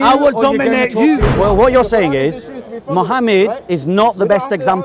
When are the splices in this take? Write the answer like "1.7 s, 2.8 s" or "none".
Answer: 1.3 s